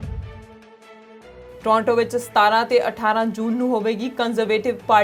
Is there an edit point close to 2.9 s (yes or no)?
no